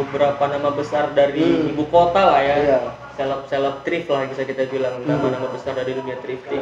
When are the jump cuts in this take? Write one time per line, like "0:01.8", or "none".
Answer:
none